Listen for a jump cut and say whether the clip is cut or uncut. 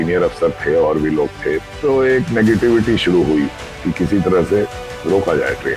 cut